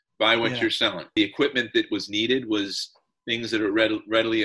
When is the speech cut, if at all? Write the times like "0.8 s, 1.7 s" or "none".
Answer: 1.0 s